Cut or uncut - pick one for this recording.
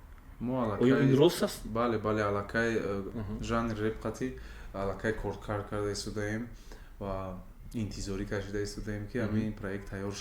cut